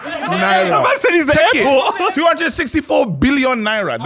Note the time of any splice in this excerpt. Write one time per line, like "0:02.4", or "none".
0:01.9